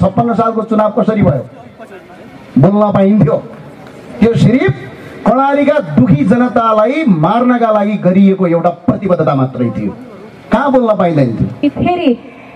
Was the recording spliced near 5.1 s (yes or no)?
no